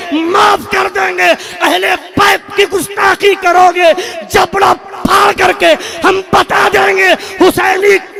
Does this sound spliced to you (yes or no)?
no